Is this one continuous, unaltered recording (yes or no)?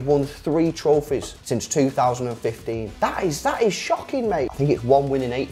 no